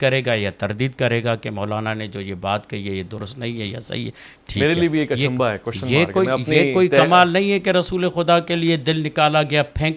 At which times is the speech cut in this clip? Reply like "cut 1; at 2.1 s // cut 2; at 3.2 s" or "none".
none